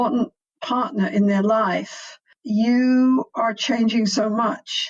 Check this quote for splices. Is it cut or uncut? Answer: cut